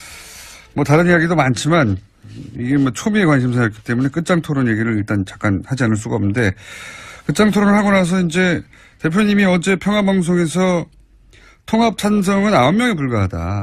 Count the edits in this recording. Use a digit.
1